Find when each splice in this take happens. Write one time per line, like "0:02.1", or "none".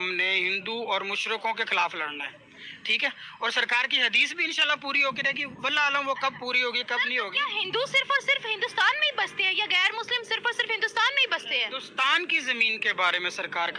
none